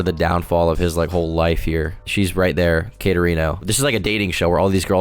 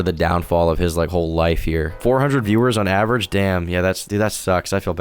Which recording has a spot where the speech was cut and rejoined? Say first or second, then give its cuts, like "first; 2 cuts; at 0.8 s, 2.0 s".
second; 2 cuts; at 2.0 s, 4.0 s